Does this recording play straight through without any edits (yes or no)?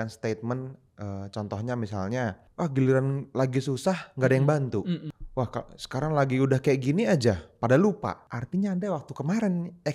no